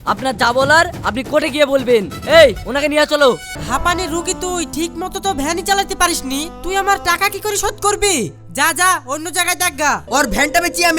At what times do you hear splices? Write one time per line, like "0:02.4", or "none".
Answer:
0:03.5
0:10.0